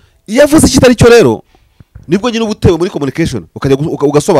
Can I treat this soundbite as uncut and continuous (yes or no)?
yes